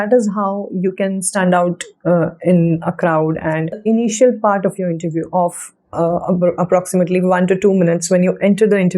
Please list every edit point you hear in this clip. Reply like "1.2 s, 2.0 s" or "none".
3.8 s

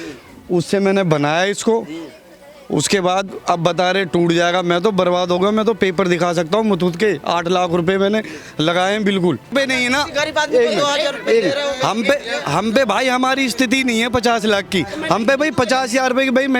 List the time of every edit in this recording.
9.5 s

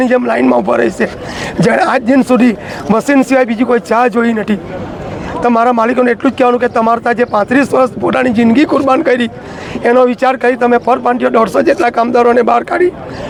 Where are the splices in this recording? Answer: none

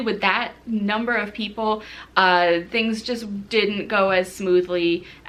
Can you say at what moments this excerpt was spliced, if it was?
none

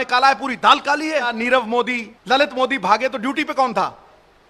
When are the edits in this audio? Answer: 1.3 s, 2.1 s

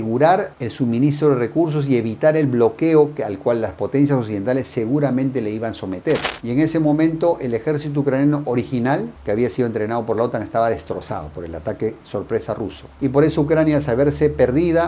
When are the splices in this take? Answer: 6.3 s

